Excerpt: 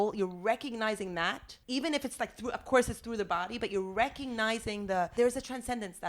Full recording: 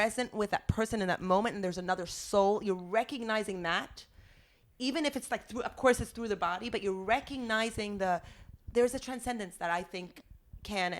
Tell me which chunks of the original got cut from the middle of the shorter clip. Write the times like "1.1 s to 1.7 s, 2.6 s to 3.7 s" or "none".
4.0 s to 4.6 s, 8.2 s to 8.7 s